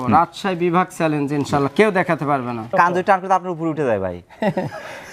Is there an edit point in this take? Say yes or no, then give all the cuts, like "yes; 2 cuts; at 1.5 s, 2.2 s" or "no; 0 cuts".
yes; 1 cut; at 2.6 s